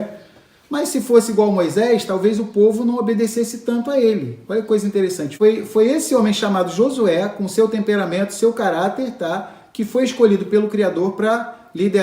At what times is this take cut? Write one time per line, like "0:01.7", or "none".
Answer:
0:05.2